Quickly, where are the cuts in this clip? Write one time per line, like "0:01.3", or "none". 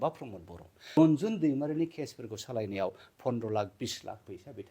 0:01.0